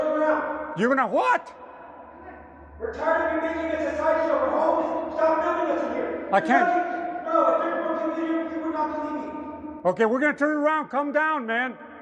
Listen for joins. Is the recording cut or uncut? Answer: uncut